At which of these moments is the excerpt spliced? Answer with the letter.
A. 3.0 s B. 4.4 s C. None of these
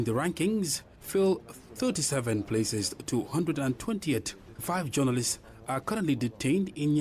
C